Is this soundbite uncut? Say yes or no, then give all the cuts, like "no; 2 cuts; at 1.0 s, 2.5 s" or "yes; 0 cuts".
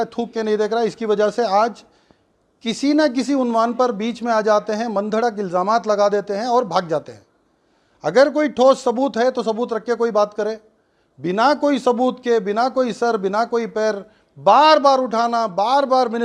yes; 0 cuts